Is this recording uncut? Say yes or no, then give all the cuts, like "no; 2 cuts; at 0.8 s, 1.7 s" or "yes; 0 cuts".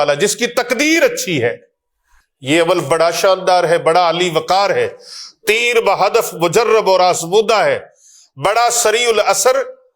yes; 0 cuts